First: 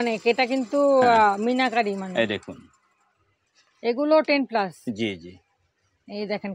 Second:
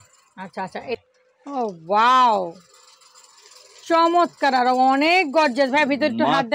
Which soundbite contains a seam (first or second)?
second